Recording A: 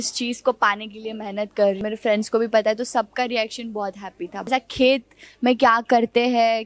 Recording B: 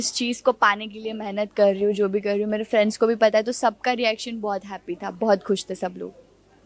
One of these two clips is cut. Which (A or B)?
A